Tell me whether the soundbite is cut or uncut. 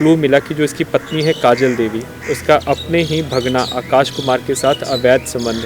uncut